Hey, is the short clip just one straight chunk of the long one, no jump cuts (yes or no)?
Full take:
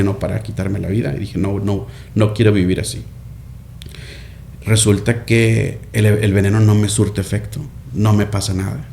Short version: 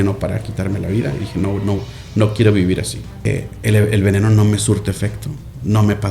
no